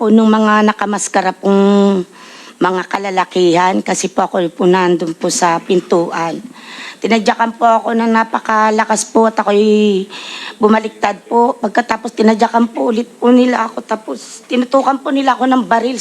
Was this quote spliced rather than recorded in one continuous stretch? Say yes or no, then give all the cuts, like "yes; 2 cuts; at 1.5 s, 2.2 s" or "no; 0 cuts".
no; 0 cuts